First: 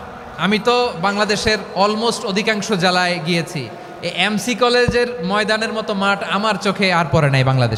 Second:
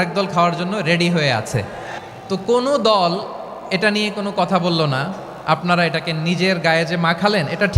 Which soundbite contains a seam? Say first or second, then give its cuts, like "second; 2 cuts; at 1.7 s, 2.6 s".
second; 1 cut; at 2.0 s